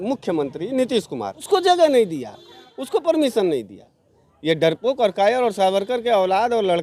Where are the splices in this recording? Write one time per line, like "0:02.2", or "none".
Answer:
0:01.4